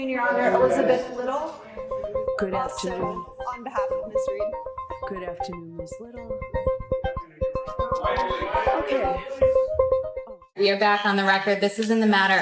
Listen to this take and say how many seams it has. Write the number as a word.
zero